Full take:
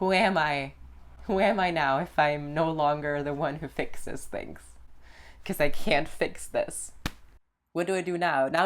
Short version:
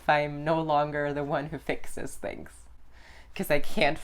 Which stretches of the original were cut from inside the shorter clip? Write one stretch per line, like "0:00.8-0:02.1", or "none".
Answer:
none